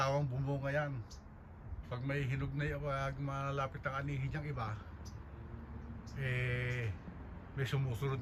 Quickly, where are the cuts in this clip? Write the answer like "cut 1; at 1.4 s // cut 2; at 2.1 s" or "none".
none